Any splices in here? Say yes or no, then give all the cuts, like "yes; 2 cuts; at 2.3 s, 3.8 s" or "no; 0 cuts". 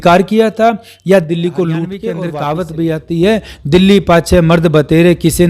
yes; 1 cut; at 2.1 s